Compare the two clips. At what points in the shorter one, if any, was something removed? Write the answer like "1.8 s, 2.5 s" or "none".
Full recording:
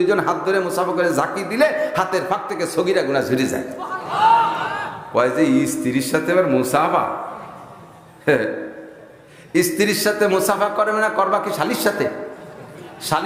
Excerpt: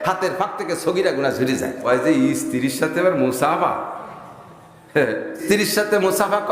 1.8 s, 5.4 s